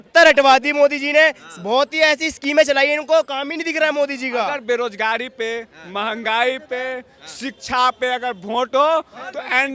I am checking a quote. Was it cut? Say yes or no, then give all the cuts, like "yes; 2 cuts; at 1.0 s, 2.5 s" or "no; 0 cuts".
yes; 1 cut; at 4.5 s